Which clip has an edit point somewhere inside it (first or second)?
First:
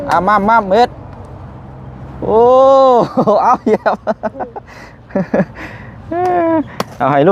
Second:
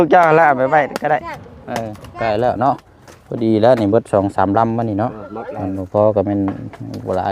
second